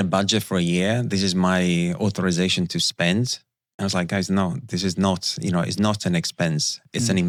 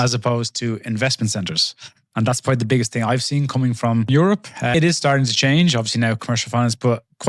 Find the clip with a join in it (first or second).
second